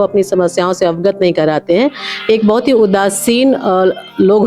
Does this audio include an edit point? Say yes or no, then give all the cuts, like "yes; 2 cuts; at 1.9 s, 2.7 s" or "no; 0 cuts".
no; 0 cuts